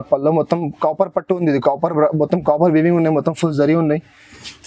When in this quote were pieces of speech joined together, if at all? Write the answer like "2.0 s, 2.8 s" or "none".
none